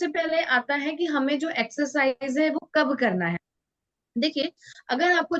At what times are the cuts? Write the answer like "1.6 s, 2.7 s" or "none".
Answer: none